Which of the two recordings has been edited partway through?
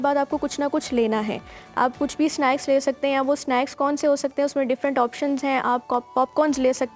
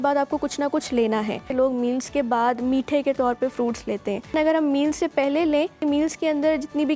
second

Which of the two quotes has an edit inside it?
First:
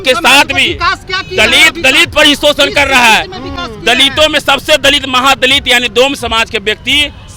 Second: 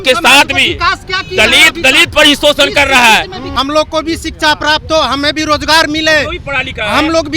second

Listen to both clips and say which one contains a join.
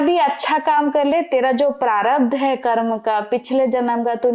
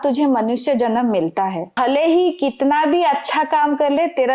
second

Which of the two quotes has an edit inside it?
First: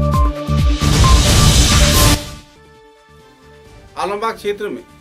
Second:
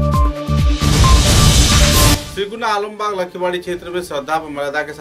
second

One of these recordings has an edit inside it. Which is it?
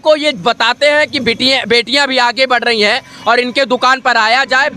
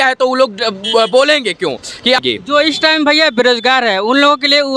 second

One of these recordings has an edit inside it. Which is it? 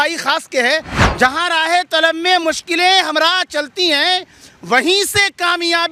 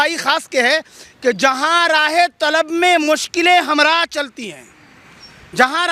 first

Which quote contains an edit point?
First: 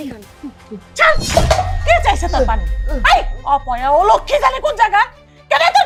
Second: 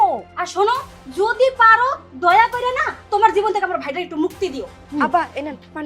second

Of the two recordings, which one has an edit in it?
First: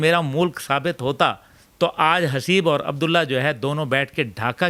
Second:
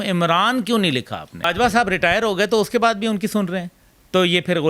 second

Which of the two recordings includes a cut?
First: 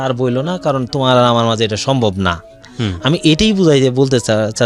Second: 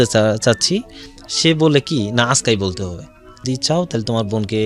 second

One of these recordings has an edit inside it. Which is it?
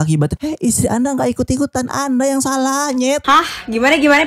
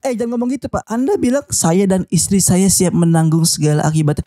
first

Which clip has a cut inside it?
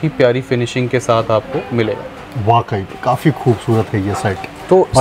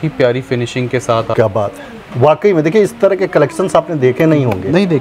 second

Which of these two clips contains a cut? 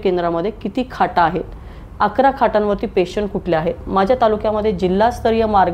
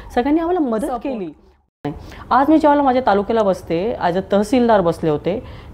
second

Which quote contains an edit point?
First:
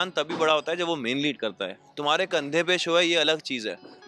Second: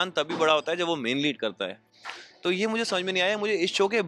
first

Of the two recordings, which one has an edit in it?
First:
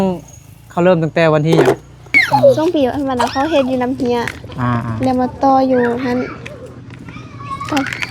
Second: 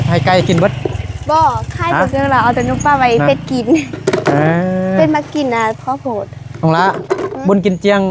first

